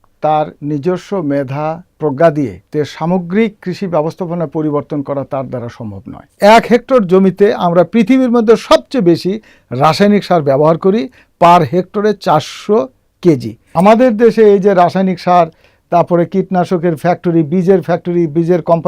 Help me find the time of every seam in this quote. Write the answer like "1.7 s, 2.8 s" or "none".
2.6 s, 6.4 s, 13.6 s